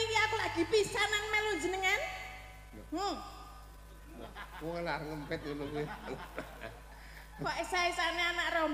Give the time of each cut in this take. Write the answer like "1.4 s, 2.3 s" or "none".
none